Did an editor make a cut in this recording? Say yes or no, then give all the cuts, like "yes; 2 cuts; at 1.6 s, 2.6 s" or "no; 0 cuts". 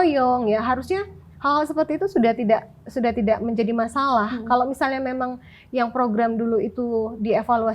no; 0 cuts